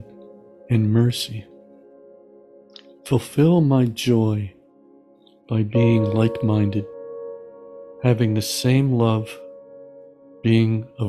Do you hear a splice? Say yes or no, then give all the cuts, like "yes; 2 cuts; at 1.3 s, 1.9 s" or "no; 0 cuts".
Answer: no; 0 cuts